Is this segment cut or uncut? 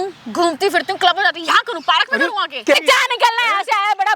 cut